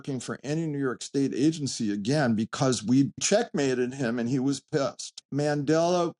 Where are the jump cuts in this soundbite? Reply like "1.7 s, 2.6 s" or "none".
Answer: 3.2 s, 5.2 s